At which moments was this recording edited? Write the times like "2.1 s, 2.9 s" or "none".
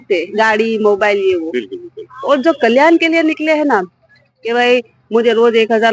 none